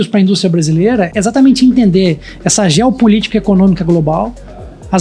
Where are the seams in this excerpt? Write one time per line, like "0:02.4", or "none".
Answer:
0:01.1